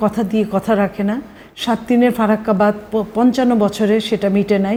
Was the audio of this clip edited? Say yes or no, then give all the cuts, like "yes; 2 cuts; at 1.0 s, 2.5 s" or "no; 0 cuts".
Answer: no; 0 cuts